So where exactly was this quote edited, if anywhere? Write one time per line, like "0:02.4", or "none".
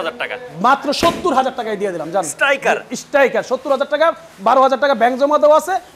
none

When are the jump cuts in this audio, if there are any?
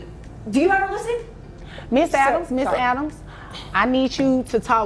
0:03.2

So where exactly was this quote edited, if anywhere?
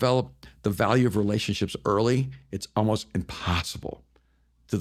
none

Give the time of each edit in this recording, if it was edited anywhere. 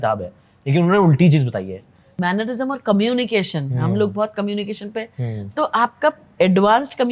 0:02.1

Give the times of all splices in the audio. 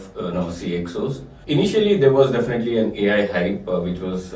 0:01.3

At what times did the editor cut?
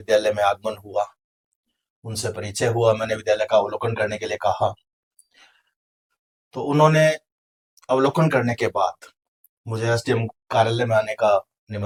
none

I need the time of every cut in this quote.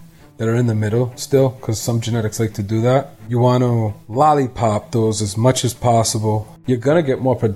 0:03.2
0:04.0
0:06.5

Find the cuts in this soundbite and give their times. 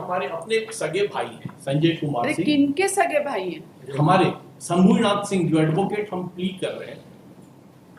none

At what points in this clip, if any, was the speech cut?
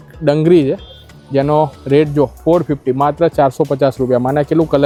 none

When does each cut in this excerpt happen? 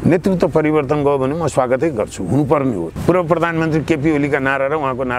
0:02.9

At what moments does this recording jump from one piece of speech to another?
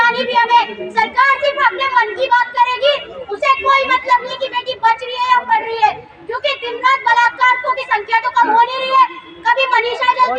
none

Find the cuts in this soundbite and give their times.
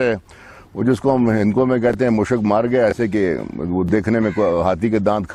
none

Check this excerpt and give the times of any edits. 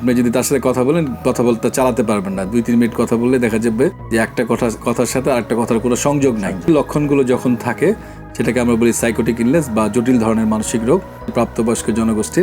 0:06.7
0:11.3

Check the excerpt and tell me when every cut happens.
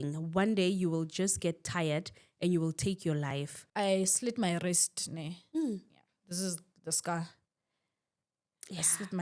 0:03.6

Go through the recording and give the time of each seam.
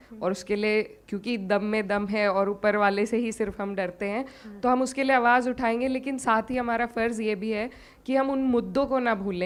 none

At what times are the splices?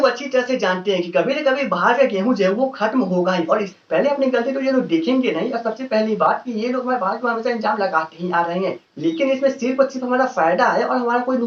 0:03.7
0:08.9

